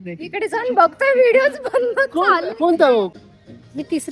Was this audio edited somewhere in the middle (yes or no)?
yes